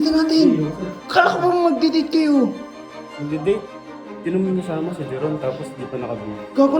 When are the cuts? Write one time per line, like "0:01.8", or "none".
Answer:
0:01.0

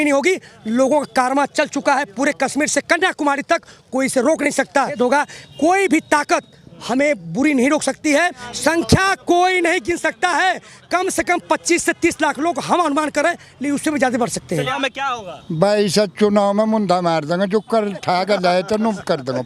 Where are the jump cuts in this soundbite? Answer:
0:05.0
0:08.4
0:14.8

